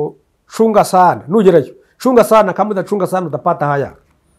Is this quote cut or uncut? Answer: uncut